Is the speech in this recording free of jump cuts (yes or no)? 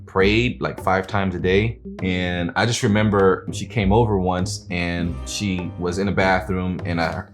no